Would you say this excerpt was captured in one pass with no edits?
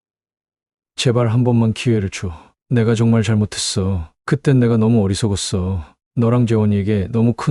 yes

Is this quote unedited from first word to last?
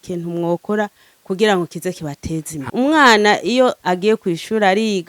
no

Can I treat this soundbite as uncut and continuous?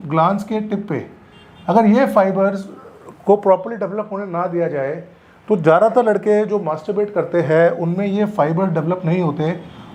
yes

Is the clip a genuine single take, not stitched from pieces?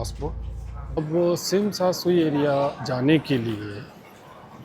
no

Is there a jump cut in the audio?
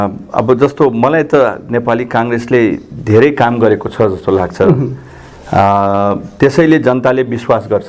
no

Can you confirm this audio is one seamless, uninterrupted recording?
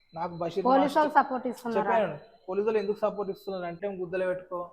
no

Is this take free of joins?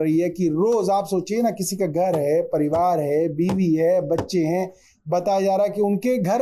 yes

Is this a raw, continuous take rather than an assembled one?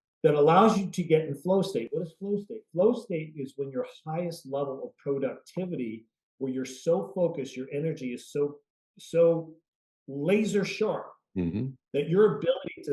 yes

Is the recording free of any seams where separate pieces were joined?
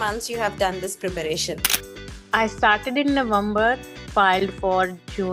no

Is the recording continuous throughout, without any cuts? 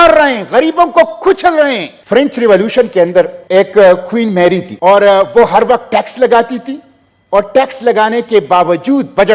no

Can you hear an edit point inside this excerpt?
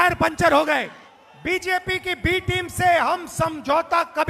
yes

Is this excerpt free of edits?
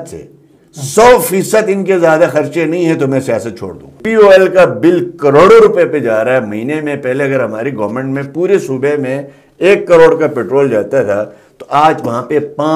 no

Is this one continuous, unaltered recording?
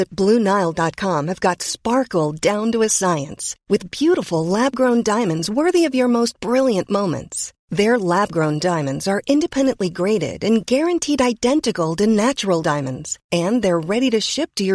yes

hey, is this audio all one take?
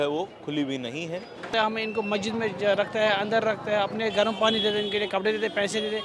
no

